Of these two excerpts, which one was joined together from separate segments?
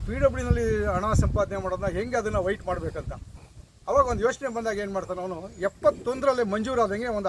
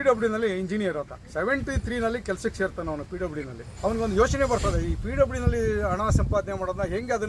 second; 2 cuts; at 1.2 s, 3.6 s

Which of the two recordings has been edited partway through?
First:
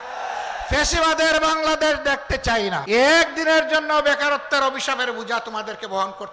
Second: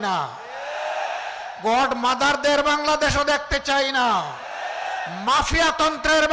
first; 1 cut; at 2.8 s

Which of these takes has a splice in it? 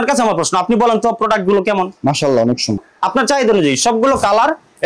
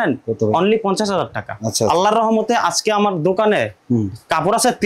first; 1 cut; at 2.8 s

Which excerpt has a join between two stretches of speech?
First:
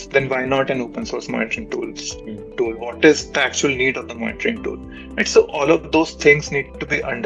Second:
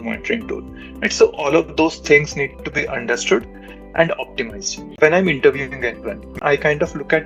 second; 2 cuts; at 5.0 s, 6.3 s

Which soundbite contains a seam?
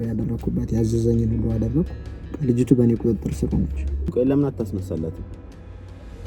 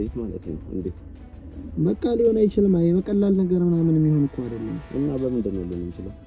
first; 1 cut; at 4.1 s

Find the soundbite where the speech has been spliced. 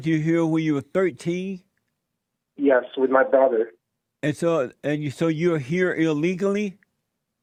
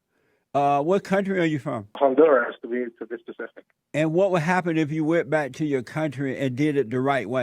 second; 1 cut; at 1.8 s

